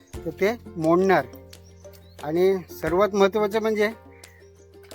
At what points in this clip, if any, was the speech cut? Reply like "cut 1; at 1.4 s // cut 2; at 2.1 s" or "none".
cut 1; at 4.0 s